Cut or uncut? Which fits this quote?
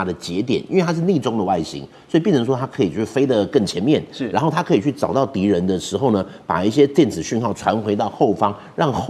uncut